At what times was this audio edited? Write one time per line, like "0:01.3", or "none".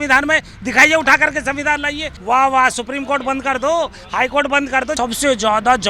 0:02.1
0:04.9